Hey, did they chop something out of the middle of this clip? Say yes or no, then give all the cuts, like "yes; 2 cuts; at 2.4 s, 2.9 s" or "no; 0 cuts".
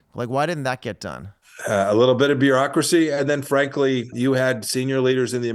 yes; 2 cuts; at 1.5 s, 4.1 s